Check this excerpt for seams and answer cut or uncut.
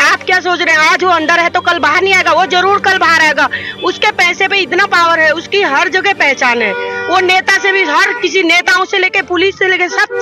uncut